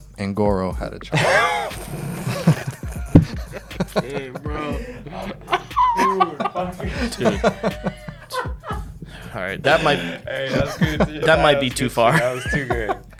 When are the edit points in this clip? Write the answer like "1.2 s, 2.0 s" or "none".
none